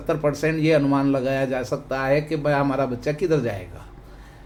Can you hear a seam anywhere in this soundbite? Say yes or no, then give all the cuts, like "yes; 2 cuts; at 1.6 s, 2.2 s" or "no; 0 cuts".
no; 0 cuts